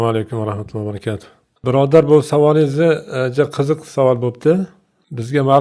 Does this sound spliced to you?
no; 0 cuts

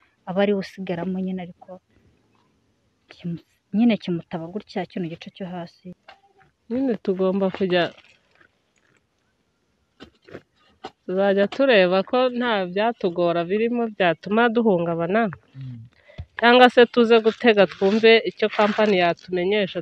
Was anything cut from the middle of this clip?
yes; 1 cut; at 6.0 s

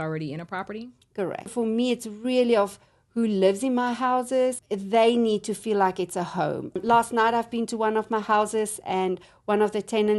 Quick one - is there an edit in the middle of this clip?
yes; 3 cuts; at 1.5 s, 4.6 s, 6.8 s

